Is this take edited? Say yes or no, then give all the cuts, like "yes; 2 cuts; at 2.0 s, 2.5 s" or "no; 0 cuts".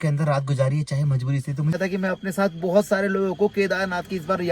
yes; 1 cut; at 1.7 s